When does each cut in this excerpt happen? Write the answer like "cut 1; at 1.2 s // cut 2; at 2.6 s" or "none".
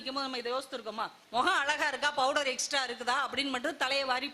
cut 1; at 1.2 s